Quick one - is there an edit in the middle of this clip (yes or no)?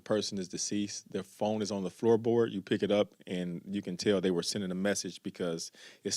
no